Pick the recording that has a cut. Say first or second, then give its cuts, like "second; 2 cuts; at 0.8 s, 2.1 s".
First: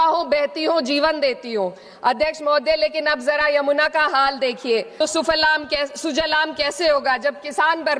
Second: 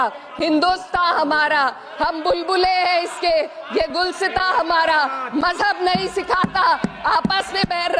first; 1 cut; at 4.9 s